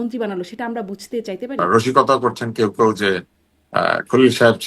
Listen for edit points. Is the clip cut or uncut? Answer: cut